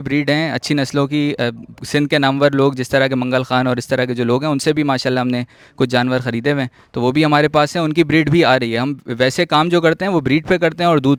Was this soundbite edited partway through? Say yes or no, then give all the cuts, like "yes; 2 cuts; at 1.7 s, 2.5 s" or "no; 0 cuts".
no; 0 cuts